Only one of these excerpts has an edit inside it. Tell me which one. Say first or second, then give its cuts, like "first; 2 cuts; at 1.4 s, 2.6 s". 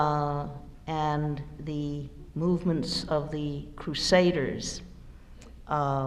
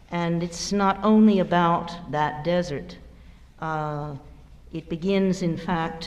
first; 1 cut; at 4.0 s